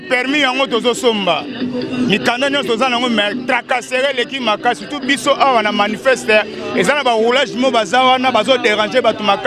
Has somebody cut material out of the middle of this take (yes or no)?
no